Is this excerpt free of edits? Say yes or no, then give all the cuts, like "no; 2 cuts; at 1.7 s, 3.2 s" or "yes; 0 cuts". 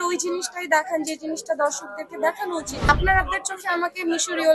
no; 1 cut; at 2.8 s